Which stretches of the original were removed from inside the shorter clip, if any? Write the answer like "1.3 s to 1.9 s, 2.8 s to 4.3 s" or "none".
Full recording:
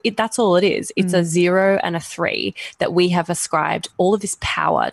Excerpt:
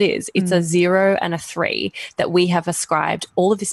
none